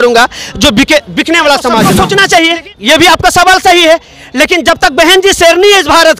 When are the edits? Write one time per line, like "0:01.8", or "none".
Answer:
0:01.9